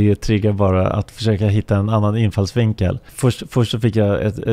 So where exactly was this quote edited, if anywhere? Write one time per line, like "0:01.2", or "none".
0:03.1